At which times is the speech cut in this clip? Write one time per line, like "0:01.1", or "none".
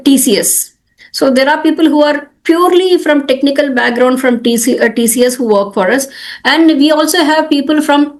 none